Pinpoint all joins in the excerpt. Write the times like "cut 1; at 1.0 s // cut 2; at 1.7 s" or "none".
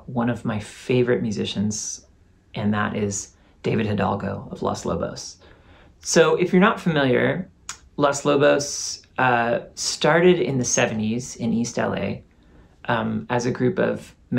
none

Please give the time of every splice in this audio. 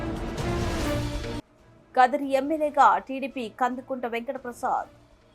cut 1; at 1.3 s

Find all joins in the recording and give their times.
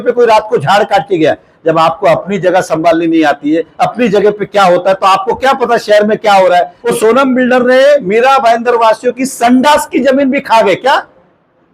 cut 1; at 6.8 s

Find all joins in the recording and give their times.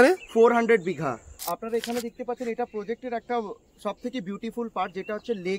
cut 1; at 1.3 s

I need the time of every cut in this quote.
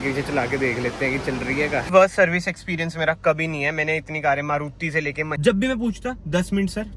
cut 1; at 1.9 s // cut 2; at 5.3 s

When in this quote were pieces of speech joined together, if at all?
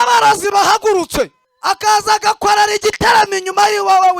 cut 1; at 1.5 s

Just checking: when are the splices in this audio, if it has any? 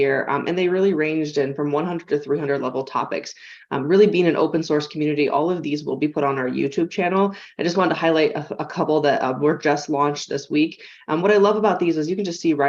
none

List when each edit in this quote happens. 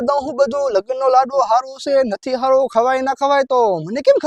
none

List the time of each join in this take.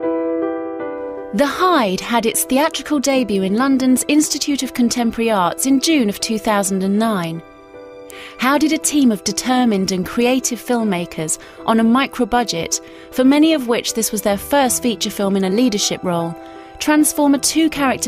cut 1; at 13.8 s

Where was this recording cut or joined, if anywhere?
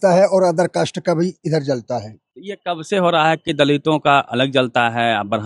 none

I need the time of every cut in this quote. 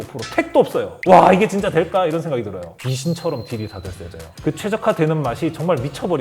cut 1; at 2.6 s // cut 2; at 4.3 s

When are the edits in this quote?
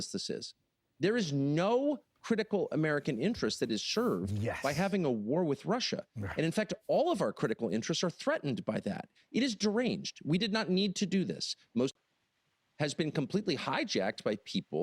cut 1; at 11.9 s

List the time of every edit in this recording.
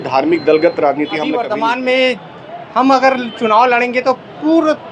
cut 1; at 1.3 s

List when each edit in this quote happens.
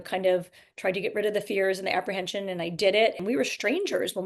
cut 1; at 3.2 s

